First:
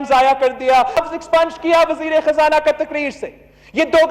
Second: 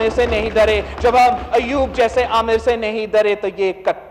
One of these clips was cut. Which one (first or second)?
first